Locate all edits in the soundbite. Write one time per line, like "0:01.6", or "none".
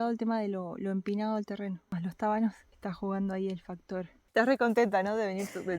0:01.8
0:02.7
0:04.2